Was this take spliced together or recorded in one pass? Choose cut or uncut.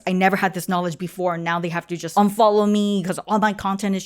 cut